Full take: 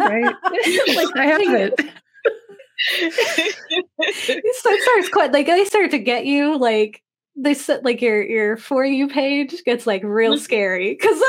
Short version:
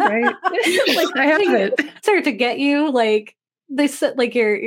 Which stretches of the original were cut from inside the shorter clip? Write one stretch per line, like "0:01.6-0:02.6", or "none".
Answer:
0:02.0-0:05.7